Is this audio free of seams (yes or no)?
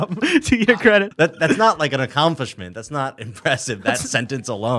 no